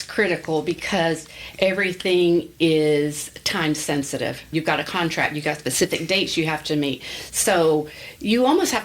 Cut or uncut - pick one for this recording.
cut